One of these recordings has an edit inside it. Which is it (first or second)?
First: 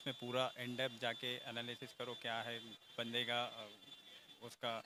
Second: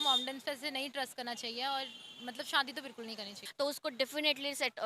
second